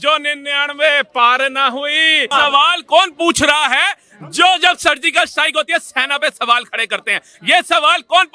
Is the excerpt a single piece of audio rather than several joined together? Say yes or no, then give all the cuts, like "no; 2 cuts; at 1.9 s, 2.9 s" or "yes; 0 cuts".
no; 1 cut; at 2.3 s